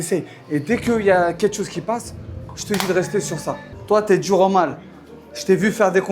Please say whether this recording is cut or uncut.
cut